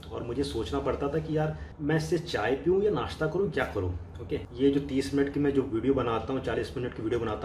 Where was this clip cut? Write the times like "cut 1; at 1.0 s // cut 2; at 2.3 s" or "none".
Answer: cut 1; at 1.7 s // cut 2; at 4.4 s